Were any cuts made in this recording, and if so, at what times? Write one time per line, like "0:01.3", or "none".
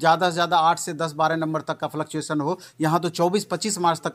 none